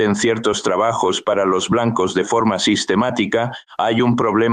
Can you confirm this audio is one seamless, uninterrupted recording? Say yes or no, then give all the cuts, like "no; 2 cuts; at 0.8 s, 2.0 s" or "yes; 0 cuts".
yes; 0 cuts